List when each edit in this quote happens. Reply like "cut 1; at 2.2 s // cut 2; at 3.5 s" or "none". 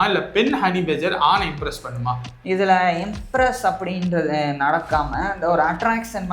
none